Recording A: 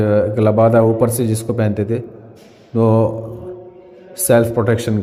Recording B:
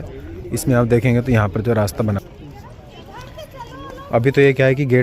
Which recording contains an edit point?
B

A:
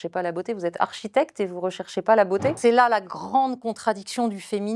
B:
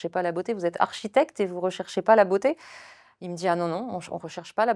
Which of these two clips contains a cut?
A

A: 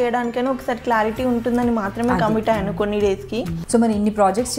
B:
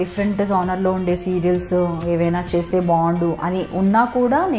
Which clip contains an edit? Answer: A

